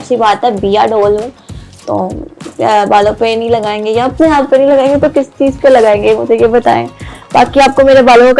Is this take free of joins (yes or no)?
yes